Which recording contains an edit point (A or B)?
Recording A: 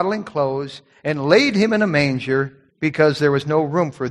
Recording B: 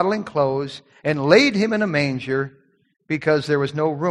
A